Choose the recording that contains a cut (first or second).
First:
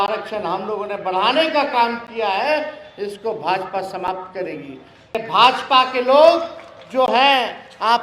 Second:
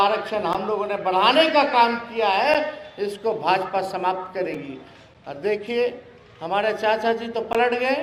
first